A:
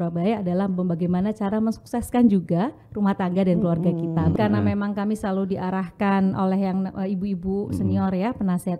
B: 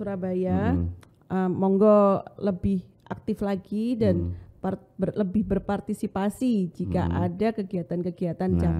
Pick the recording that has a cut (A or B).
A